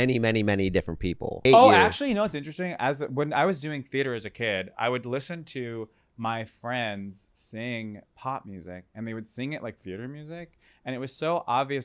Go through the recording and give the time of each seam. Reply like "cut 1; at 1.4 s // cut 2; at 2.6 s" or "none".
cut 1; at 1.4 s

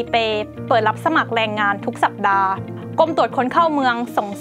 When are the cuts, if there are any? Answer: cut 1; at 2.8 s

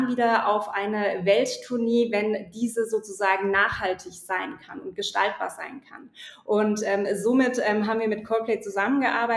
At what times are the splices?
none

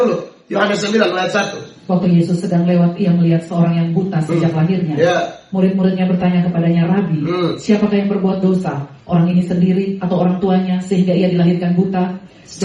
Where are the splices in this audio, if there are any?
none

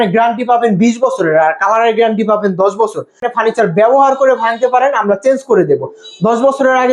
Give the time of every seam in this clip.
cut 1; at 3.3 s

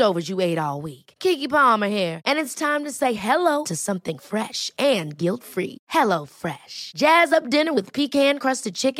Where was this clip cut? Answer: none

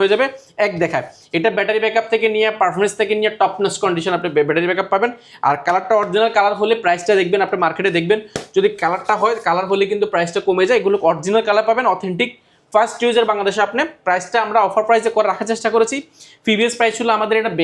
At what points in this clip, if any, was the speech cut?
none

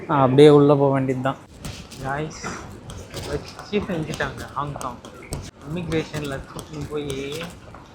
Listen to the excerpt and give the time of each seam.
cut 1; at 1.5 s // cut 2; at 5.5 s

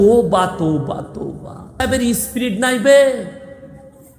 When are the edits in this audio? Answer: cut 1; at 1.8 s

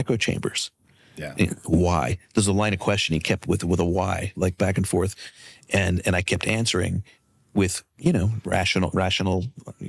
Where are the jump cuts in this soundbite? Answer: none

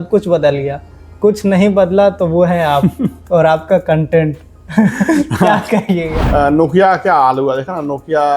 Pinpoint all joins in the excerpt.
cut 1; at 6.2 s

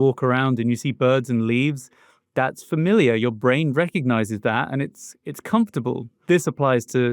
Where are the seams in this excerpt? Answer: none

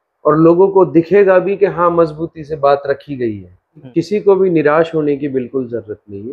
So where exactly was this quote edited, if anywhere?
cut 1; at 3.8 s

